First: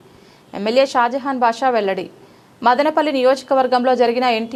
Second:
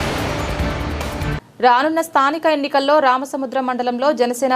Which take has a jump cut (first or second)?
second